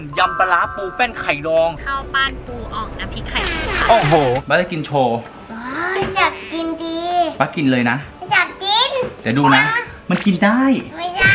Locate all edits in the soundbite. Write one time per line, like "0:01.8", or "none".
0:04.4